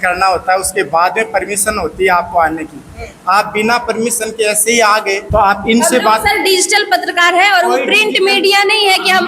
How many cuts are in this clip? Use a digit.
1